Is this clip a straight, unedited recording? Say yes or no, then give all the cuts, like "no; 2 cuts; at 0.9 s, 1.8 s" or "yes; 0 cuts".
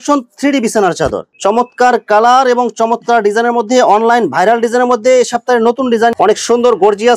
no; 2 cuts; at 1.3 s, 6.1 s